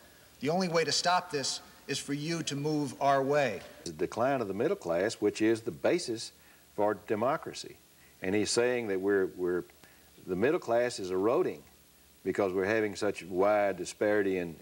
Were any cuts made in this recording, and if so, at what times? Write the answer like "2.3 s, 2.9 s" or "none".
3.9 s

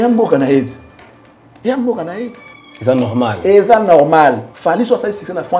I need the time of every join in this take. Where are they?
4.5 s

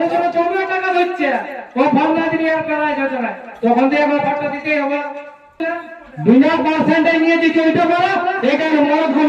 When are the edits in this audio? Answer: 5.7 s

